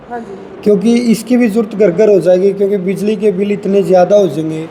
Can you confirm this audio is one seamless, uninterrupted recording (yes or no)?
yes